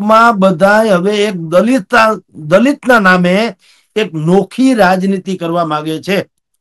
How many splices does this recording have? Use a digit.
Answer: 0